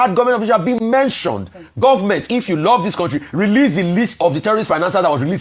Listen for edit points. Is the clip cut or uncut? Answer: uncut